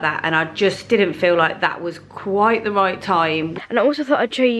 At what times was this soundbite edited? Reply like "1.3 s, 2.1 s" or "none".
3.5 s